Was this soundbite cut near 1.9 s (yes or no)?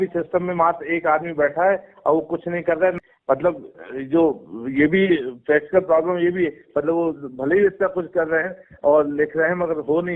no